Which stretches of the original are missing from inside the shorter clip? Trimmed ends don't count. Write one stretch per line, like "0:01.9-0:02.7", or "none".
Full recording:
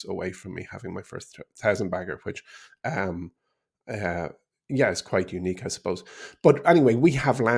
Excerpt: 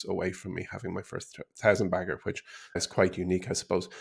0:02.8-0:04.9